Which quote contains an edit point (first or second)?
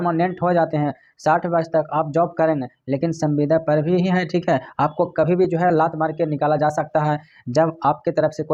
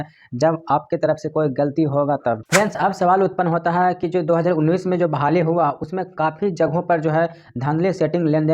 second